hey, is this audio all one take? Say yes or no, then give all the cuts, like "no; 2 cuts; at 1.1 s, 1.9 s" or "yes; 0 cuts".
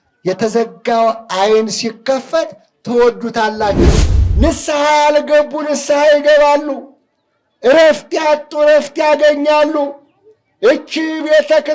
no; 1 cut; at 3.9 s